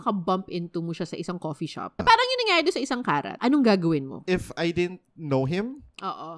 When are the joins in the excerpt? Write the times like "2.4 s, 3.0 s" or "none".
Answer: 2.0 s, 3.3 s, 4.2 s